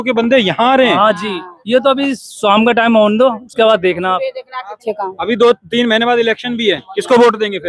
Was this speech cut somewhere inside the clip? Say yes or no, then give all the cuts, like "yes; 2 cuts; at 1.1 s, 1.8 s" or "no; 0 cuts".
yes; 1 cut; at 4.8 s